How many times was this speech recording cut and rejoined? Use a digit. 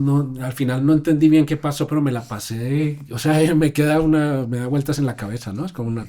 0